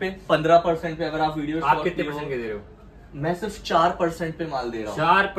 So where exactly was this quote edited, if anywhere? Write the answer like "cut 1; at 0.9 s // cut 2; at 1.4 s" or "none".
none